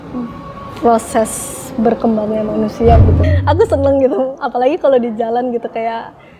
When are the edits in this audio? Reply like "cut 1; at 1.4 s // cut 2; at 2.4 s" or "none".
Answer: cut 1; at 3.2 s